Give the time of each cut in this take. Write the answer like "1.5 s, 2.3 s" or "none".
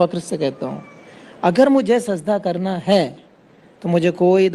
none